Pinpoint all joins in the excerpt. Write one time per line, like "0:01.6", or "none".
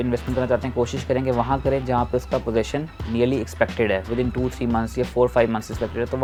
none

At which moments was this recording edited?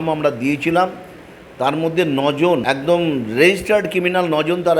0:02.6

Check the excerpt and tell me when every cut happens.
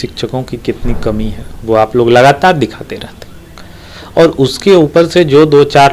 none

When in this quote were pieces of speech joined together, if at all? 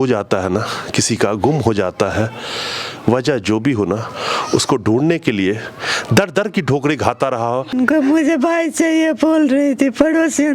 0:07.7

